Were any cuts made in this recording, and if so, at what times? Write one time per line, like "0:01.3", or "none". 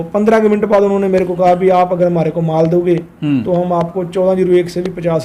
none